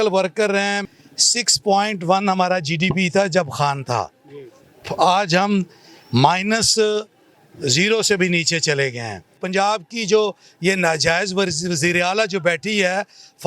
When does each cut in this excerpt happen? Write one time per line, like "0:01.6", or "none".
0:00.9
0:09.4